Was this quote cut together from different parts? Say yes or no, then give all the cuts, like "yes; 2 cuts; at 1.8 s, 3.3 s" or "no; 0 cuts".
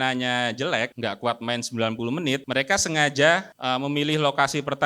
yes; 3 cuts; at 0.9 s, 2.4 s, 3.5 s